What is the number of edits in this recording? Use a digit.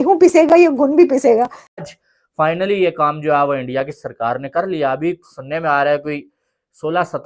1